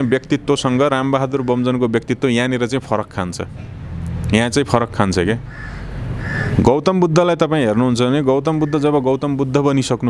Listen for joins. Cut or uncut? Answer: uncut